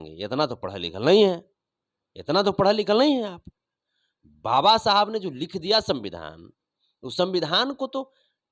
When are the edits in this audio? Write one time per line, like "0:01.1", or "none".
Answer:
none